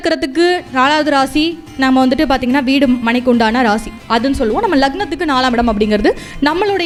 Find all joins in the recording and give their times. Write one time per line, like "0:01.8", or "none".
none